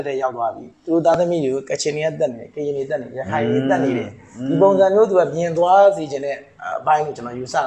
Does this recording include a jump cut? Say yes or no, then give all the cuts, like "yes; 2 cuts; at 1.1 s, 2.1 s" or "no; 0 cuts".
no; 0 cuts